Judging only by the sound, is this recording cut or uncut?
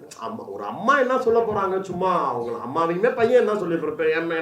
uncut